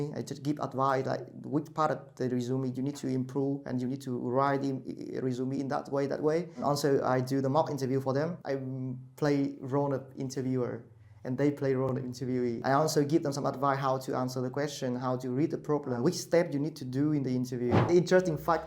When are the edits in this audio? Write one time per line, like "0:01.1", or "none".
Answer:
0:06.6
0:08.4
0:12.6
0:16.0
0:17.9